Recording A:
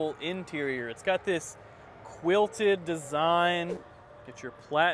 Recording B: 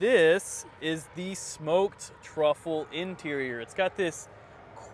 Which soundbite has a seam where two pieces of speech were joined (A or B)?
A